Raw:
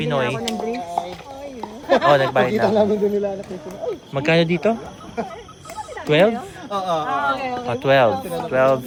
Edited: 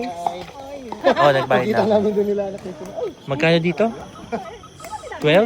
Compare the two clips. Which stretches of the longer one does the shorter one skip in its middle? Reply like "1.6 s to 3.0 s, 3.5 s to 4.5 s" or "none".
1.6 s to 1.8 s

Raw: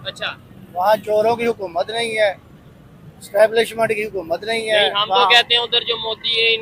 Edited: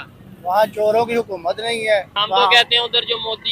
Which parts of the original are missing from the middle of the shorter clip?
2.5 s to 5.0 s

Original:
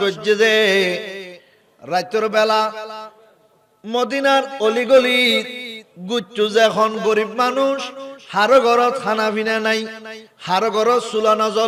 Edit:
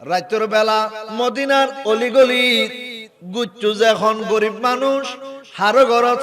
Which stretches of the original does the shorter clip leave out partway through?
2.8 s to 3.8 s

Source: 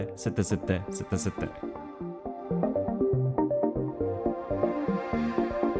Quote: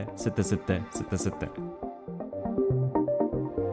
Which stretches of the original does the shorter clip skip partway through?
1.3 s to 1.8 s

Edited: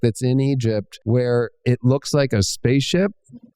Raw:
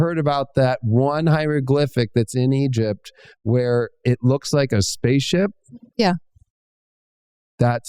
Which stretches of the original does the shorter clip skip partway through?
3.1 s to 3.3 s

